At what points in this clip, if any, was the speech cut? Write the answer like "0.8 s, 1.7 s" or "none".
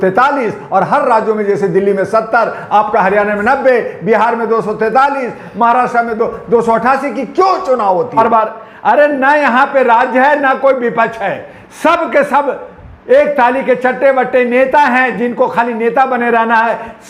8.2 s